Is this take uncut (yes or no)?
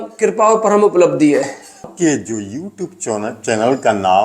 no